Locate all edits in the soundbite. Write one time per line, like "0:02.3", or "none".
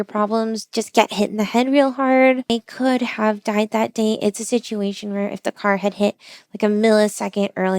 0:02.5